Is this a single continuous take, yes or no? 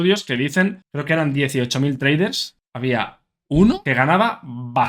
no